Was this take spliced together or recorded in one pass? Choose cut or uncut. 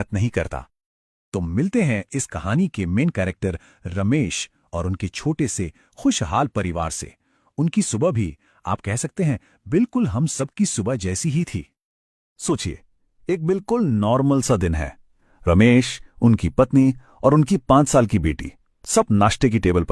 cut